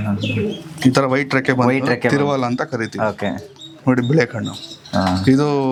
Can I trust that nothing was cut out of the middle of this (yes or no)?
yes